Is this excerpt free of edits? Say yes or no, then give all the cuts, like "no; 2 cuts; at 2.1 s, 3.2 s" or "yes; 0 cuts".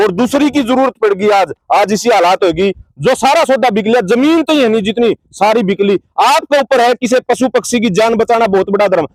yes; 0 cuts